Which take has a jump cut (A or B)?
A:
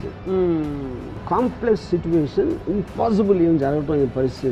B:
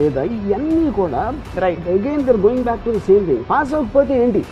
A